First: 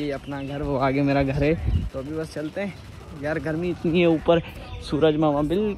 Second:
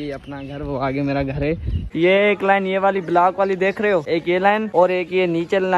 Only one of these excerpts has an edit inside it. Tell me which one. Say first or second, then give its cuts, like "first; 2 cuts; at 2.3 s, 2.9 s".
second; 2 cuts; at 1.8 s, 4.3 s